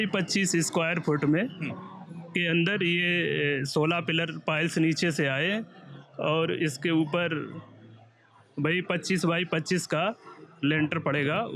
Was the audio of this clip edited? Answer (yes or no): no